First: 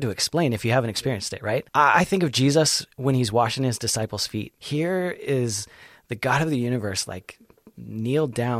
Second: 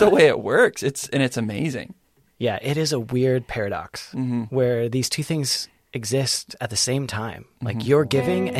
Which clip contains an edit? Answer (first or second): first